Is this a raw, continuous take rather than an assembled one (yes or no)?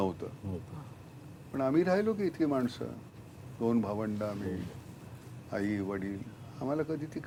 yes